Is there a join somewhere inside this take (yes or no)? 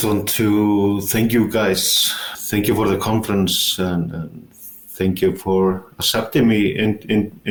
no